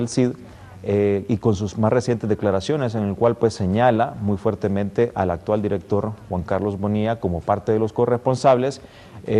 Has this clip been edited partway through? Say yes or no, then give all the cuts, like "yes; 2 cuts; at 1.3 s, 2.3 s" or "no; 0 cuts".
yes; 1 cut; at 7.6 s